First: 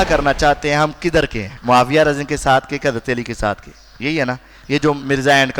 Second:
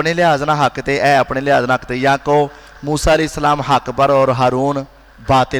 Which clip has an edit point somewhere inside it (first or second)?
first